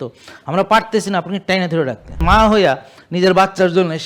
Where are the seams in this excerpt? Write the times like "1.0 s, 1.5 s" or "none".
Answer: 2.2 s